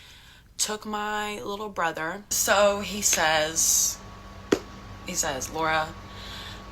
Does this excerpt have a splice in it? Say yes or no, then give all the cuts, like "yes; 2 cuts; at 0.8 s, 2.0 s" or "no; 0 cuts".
yes; 1 cut; at 2.3 s